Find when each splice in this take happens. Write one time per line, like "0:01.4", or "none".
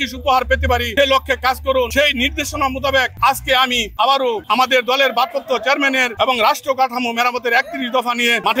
none

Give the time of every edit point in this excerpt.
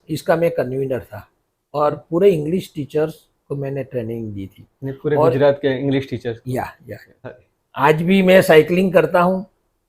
0:07.4

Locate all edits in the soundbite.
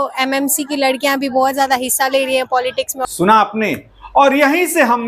none

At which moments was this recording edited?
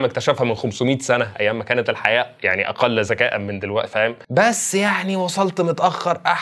none

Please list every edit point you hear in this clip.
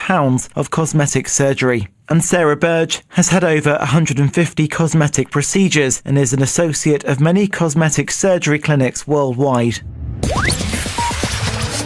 0:09.9

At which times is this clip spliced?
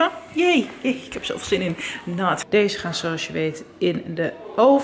0:02.4

